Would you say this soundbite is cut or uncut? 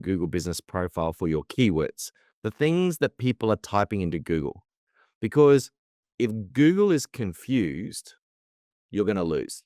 uncut